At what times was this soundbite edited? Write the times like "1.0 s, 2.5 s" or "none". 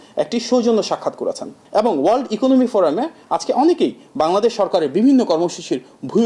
1.5 s